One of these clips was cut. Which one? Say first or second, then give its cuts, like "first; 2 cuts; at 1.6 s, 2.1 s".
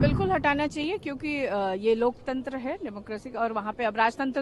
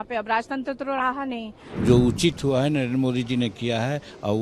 second; 1 cut; at 1.7 s